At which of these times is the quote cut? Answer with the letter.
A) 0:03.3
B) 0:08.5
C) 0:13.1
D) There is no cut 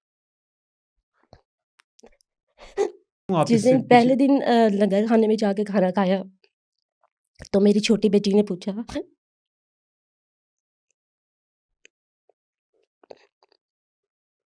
A